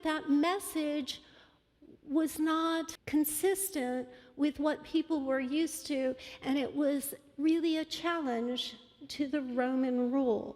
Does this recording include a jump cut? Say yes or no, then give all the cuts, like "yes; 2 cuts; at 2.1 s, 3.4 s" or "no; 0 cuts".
yes; 1 cut; at 3.0 s